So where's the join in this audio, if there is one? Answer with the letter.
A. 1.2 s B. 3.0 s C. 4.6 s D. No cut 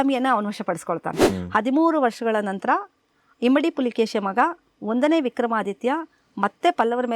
A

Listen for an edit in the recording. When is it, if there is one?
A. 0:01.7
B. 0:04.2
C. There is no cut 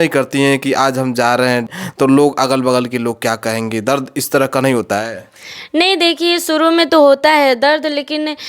A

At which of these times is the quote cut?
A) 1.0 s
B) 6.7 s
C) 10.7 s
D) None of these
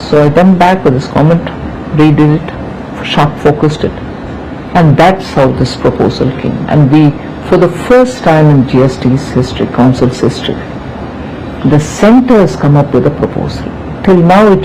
A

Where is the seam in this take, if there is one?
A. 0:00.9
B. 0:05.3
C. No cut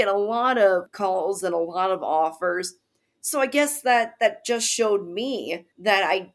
A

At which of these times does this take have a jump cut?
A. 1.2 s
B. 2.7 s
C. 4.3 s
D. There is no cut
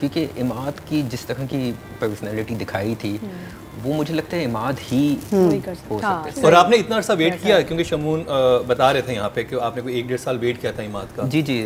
D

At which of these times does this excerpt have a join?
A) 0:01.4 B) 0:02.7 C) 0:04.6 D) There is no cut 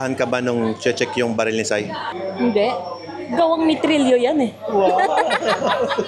D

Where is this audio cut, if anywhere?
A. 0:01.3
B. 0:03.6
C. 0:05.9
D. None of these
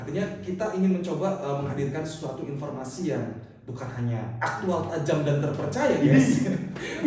D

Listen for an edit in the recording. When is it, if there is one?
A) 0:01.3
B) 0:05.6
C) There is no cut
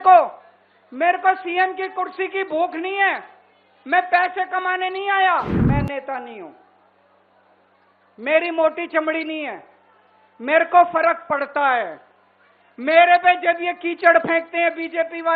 B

